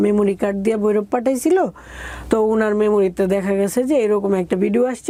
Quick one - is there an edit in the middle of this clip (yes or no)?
no